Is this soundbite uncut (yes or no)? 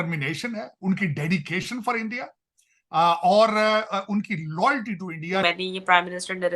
no